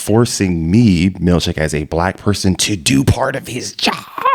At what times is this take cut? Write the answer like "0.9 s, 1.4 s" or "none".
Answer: none